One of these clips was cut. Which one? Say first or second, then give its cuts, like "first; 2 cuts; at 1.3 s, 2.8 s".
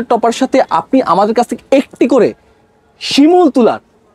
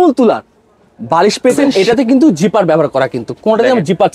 second; 1 cut; at 1.7 s